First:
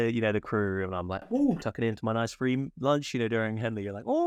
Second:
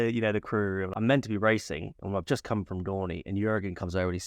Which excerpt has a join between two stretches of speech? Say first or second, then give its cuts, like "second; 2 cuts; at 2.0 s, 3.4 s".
second; 1 cut; at 0.9 s